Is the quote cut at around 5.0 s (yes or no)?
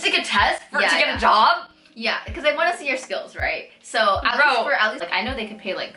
yes